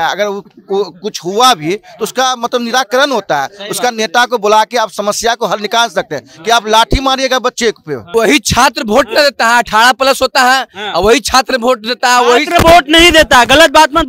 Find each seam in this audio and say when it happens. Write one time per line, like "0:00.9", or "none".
0:08.1